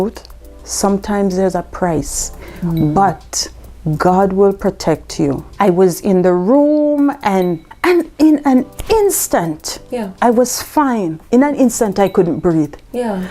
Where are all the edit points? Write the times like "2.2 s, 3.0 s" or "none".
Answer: 5.5 s, 7.7 s

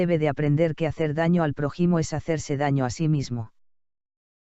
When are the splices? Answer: 1.7 s

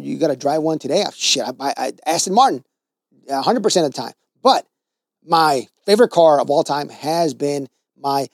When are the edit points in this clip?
none

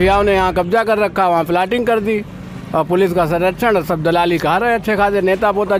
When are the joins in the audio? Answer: none

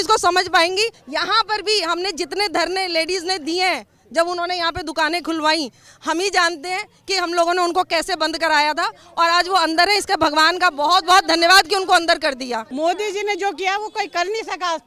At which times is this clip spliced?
1.0 s, 12.6 s

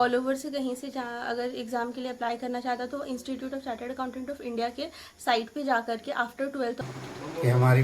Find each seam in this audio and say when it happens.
6.9 s

